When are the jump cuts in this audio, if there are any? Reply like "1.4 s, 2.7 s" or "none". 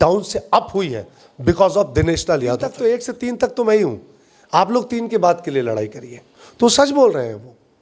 2.7 s